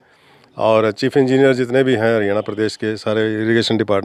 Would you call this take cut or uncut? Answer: uncut